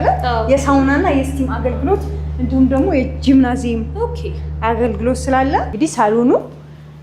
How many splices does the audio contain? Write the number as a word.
one